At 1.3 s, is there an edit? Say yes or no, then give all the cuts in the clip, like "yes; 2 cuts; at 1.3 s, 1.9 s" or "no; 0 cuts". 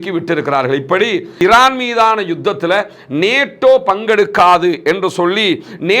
yes; 1 cut; at 1.3 s